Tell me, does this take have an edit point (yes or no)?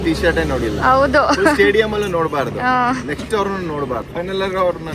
yes